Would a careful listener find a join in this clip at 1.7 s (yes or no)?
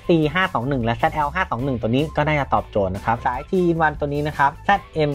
no